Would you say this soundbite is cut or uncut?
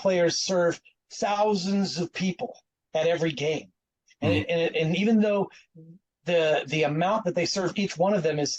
uncut